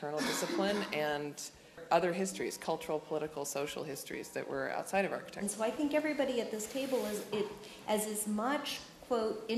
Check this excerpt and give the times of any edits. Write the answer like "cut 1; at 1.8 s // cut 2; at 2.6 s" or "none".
cut 1; at 1.8 s // cut 2; at 5.4 s